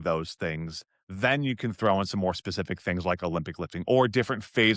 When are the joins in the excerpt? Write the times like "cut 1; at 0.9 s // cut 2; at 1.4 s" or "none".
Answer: none